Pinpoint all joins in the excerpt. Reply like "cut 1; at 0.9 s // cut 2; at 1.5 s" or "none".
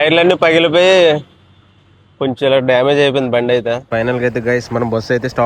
cut 1; at 3.8 s